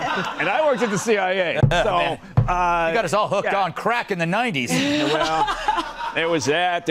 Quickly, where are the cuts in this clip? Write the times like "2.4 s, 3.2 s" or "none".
1.6 s